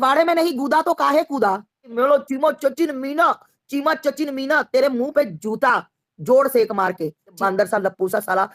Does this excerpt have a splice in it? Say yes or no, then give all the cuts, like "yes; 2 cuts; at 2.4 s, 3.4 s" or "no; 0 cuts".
yes; 2 cuts; at 1.9 s, 7.4 s